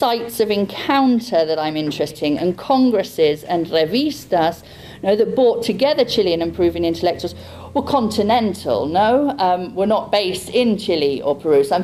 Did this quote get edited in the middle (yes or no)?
no